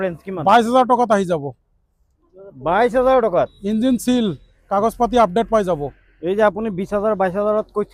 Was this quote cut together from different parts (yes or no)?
no